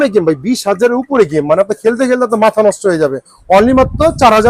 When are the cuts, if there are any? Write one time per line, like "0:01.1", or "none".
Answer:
none